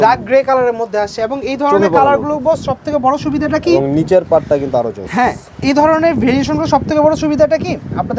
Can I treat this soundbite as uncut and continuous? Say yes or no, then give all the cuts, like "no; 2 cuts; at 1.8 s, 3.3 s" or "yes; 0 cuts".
yes; 0 cuts